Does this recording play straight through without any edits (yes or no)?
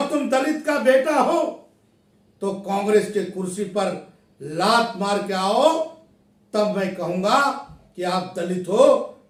yes